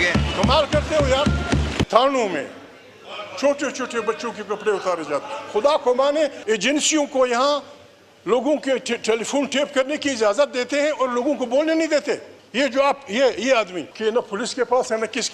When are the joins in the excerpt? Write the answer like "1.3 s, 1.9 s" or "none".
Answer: 1.8 s, 6.4 s, 12.4 s, 13.8 s